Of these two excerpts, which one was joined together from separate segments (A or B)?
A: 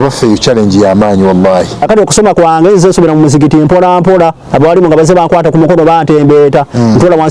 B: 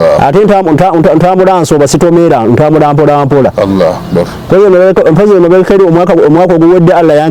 A